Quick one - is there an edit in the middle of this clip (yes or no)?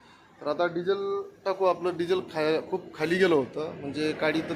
no